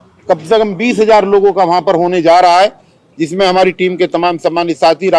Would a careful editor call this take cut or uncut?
uncut